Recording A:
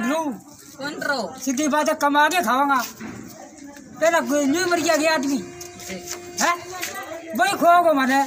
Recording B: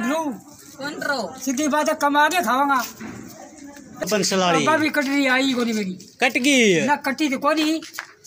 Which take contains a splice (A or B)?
B